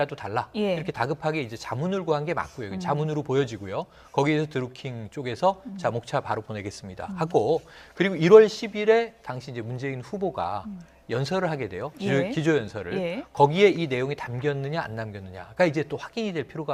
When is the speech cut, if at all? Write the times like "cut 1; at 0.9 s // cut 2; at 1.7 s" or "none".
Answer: none